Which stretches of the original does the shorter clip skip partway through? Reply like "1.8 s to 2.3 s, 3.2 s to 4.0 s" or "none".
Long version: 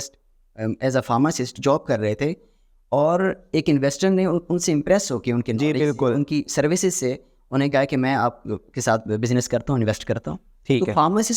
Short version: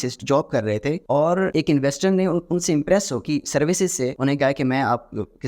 2.8 s to 3.4 s, 5.2 s to 6.3 s, 7.2 s to 7.5 s